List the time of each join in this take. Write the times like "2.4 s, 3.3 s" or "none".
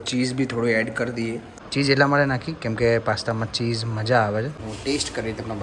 1.6 s, 4.6 s